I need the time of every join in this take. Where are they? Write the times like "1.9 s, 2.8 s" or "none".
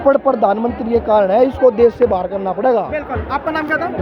none